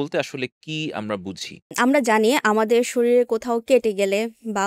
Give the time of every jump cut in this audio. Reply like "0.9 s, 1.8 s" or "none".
1.7 s